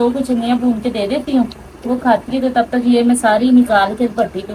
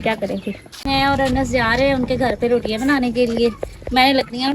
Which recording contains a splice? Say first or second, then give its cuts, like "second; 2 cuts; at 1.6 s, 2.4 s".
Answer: second; 1 cut; at 0.9 s